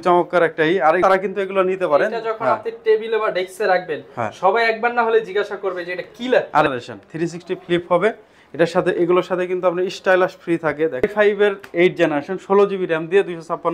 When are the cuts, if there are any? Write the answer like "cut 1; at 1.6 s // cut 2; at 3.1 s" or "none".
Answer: cut 1; at 1.0 s // cut 2; at 6.7 s // cut 3; at 11.1 s